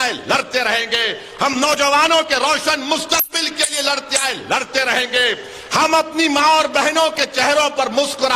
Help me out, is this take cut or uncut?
uncut